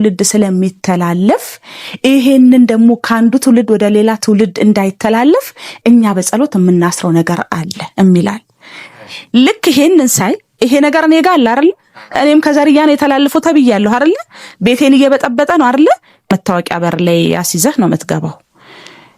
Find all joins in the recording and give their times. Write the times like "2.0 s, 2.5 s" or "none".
16.1 s